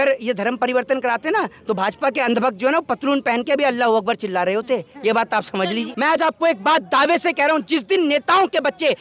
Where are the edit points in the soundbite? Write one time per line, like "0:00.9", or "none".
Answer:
0:05.9